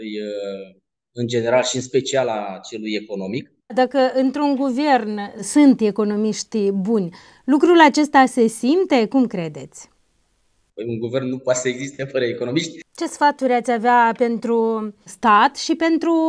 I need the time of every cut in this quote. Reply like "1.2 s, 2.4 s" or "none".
3.7 s, 12.8 s